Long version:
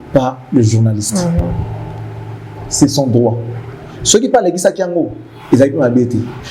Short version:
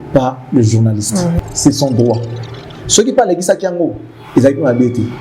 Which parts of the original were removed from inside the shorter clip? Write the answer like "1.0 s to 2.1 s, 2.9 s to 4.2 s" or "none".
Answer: 1.4 s to 2.6 s